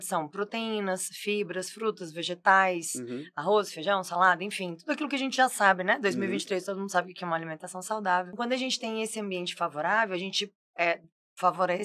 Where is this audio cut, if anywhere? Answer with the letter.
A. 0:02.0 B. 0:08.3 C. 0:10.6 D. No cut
B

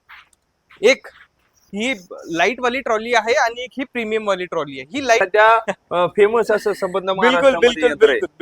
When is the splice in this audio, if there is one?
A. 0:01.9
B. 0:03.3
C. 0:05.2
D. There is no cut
C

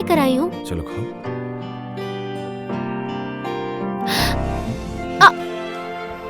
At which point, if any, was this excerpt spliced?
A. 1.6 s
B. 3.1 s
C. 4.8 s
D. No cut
C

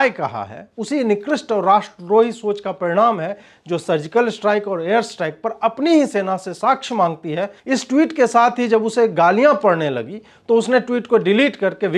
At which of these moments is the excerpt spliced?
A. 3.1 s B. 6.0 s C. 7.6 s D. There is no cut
C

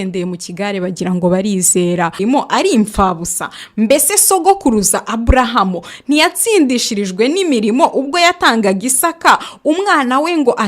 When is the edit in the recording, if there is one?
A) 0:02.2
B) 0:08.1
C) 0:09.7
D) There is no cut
A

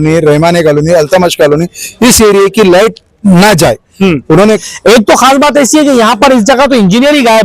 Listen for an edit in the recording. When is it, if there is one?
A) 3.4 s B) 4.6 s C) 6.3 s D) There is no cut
B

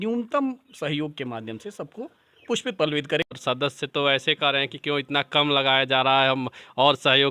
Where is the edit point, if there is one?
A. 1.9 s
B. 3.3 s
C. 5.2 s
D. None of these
B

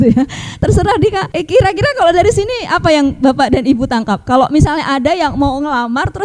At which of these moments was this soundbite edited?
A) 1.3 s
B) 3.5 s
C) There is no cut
A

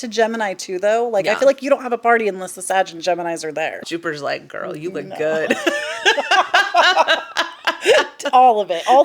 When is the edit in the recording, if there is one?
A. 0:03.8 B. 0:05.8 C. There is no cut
A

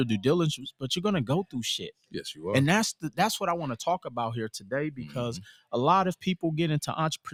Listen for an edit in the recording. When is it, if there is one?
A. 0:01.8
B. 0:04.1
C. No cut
C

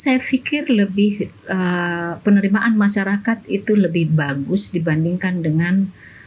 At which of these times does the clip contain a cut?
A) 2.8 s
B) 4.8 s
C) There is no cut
C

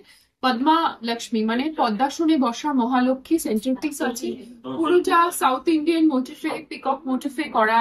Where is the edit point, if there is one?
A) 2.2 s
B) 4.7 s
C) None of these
C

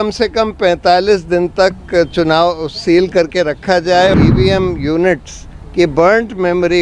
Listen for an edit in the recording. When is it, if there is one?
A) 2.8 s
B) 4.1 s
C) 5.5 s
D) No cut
B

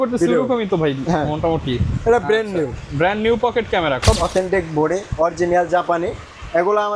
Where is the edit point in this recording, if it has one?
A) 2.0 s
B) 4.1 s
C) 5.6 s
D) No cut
B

